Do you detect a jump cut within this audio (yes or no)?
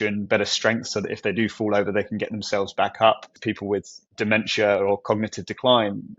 yes